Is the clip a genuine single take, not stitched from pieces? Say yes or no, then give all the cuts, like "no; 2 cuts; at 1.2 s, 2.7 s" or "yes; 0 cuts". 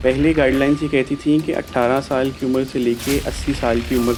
yes; 0 cuts